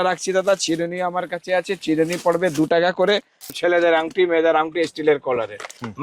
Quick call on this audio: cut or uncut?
cut